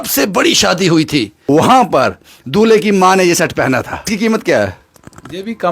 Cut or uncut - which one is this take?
cut